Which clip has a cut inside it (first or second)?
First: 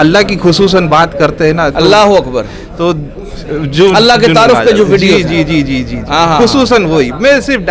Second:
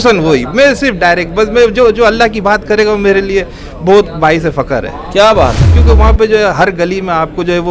second